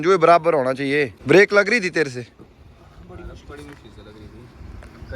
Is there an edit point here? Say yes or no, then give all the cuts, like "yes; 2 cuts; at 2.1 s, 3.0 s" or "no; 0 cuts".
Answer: yes; 1 cut; at 1.2 s